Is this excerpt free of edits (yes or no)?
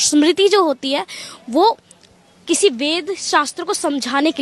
yes